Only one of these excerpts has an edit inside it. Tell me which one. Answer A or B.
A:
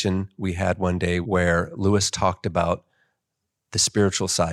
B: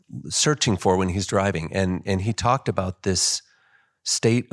A